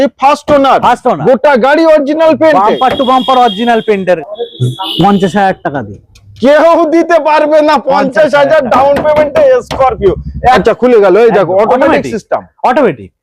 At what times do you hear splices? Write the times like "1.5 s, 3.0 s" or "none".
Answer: 4.2 s, 10.6 s